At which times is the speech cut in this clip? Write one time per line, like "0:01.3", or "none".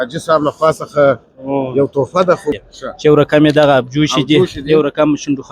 0:02.5